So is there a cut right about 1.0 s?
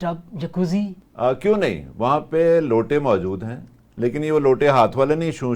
yes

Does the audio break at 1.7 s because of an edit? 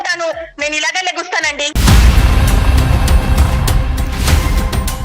yes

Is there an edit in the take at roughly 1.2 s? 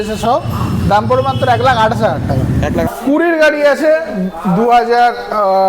no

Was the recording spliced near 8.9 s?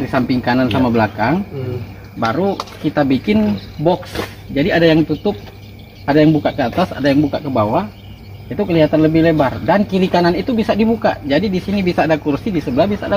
no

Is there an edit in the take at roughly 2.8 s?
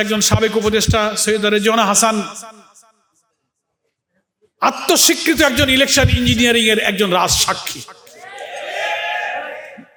no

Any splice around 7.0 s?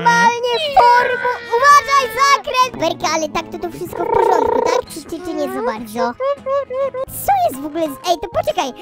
yes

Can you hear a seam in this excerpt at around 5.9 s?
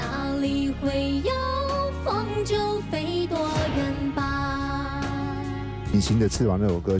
yes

